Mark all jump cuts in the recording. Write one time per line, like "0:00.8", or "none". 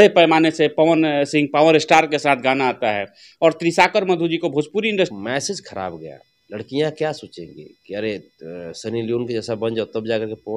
0:05.1